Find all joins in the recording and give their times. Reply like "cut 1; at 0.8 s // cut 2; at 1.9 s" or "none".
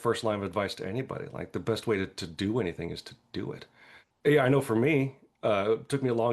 none